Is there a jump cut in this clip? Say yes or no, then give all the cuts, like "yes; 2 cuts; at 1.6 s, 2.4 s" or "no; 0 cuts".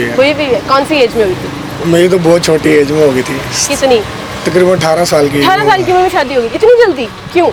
no; 0 cuts